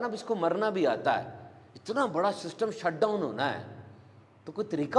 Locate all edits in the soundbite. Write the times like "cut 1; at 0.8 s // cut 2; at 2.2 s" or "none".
none